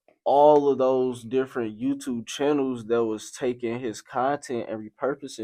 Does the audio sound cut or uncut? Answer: uncut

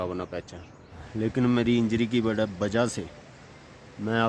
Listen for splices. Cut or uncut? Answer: cut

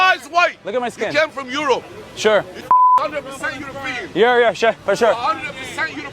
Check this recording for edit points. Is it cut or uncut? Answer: cut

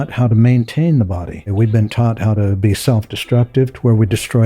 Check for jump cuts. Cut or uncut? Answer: cut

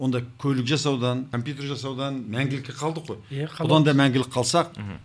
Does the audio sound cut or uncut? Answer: cut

